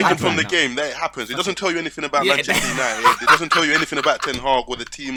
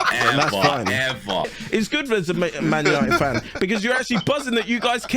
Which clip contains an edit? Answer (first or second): second